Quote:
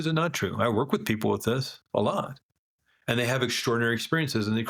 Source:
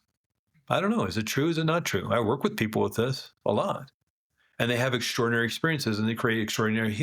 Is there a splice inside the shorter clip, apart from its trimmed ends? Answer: no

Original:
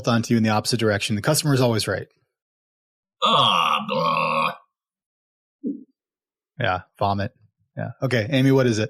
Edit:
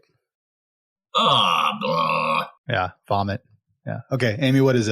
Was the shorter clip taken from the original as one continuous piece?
no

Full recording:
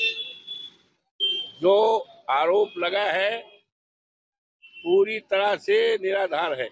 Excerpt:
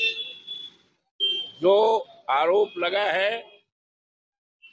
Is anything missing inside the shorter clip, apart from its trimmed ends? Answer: no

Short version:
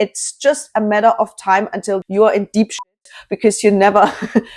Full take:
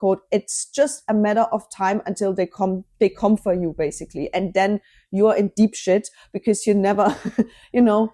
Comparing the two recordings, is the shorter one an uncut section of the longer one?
no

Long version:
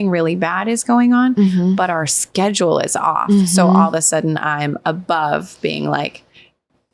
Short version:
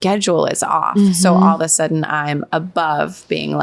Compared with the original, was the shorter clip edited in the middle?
no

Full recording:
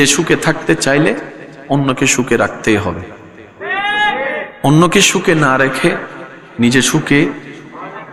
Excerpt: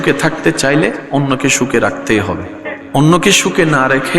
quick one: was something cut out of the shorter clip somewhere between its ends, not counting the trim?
yes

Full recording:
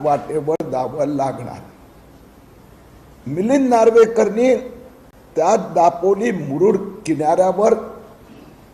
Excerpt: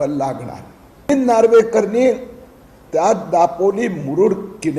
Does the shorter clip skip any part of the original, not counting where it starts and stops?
yes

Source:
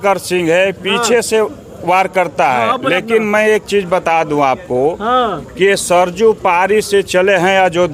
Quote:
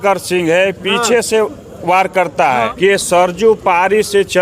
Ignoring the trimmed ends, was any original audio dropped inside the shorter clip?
yes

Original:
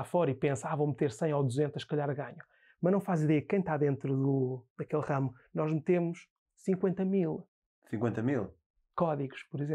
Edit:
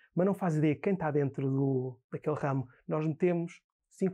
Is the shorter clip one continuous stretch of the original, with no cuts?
yes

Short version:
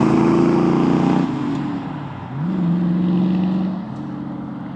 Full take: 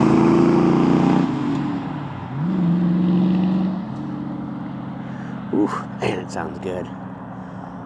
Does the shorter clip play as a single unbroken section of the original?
yes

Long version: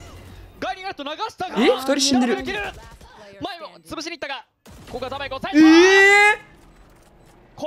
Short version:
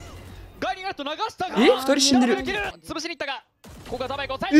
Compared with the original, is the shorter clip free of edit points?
no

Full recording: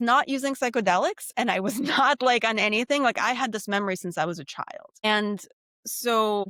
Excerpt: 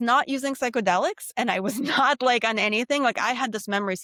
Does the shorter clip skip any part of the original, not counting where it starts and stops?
no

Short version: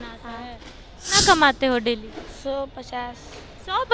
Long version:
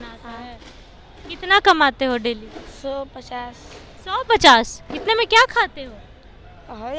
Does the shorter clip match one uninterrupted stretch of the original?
no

